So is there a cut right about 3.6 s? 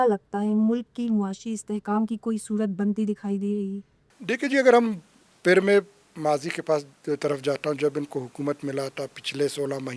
no; 0 cuts

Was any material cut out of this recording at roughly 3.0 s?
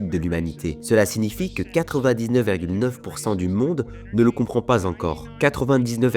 no; 1 cut; at 5.2 s

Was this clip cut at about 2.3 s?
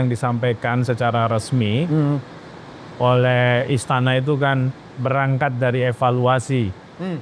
no; 0 cuts

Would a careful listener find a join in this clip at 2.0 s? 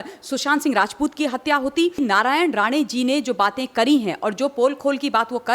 yes; 1 cut; at 2.0 s

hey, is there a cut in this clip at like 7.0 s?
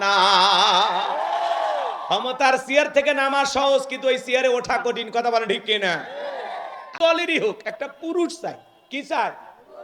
yes; 1 cut; at 7.0 s

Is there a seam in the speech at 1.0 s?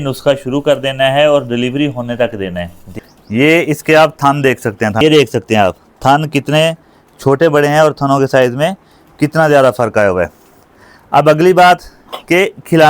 no; 2 cuts; at 2.8 s, 5.0 s

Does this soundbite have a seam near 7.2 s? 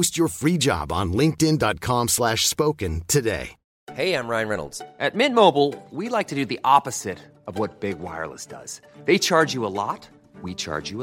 no; 1 cut; at 3.6 s

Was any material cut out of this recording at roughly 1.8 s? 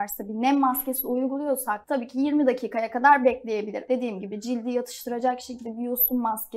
yes; 2 cuts; at 1.8 s, 3.8 s

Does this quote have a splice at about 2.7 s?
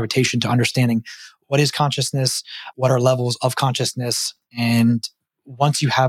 yes; 1 cut; at 2.7 s

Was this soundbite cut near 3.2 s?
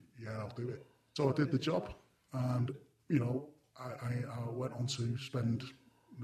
no; 1 cut; at 0.9 s

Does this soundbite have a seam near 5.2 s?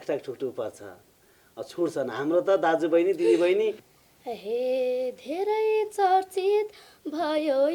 no; 1 cut; at 3.9 s

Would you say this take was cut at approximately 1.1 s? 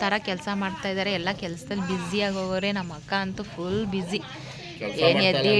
no; 0 cuts

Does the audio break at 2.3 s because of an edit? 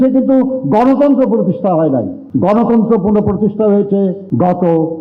no; 0 cuts

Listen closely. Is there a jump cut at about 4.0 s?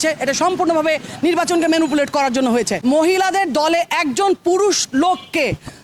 no; 1 cut; at 2.7 s

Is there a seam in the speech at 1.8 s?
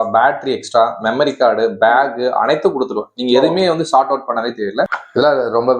no; 1 cut; at 4.9 s

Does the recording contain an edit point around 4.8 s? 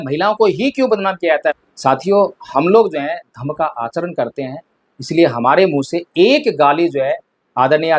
no; 1 cut; at 1.6 s

